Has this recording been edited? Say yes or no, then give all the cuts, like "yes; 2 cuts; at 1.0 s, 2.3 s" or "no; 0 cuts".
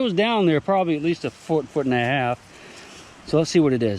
no; 0 cuts